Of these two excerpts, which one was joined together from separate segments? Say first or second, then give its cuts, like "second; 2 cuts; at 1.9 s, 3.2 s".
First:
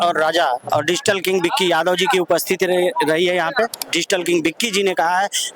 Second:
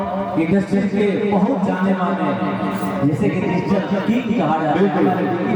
first; 1 cut; at 3.8 s